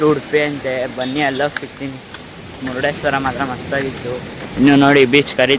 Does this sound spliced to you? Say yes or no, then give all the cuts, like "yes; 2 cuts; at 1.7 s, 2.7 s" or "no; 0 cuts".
no; 0 cuts